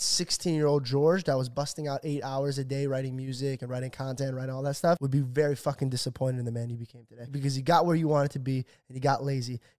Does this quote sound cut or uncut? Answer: cut